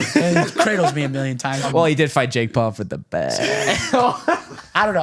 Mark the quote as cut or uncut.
cut